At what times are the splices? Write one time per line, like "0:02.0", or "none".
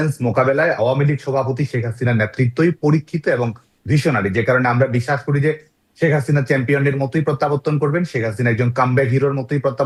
none